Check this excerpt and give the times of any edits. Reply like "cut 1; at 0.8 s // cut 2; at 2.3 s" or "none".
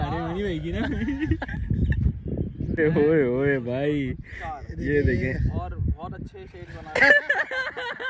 cut 1; at 2.8 s